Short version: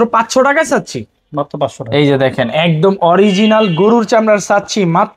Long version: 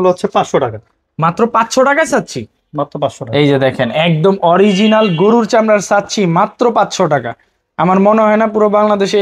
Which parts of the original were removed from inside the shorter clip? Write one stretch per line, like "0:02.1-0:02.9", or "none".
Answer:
none